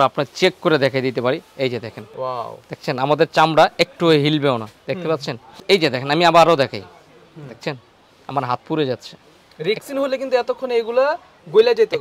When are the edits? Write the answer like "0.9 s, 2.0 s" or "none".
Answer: 2.0 s, 5.5 s